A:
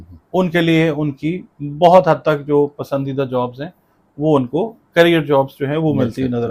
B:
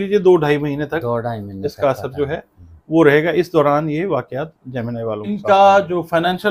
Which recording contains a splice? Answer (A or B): B